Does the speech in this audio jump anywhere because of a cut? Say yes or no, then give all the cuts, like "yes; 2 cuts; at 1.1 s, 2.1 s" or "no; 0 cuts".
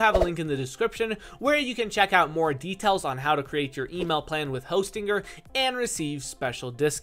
no; 0 cuts